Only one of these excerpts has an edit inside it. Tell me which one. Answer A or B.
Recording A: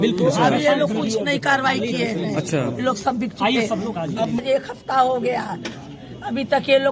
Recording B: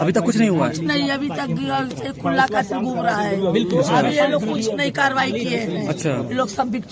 A